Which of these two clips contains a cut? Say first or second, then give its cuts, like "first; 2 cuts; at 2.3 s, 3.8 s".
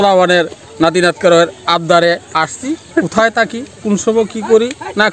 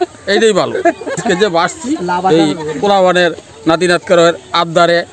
second; 1 cut; at 1.2 s